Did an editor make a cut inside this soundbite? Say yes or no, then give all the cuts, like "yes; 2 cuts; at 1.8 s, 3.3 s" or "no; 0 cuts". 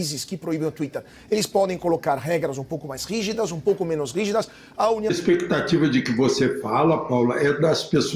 yes; 1 cut; at 5.1 s